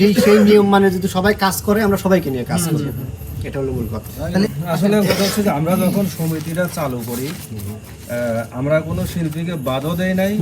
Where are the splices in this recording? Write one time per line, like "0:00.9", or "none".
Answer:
0:04.6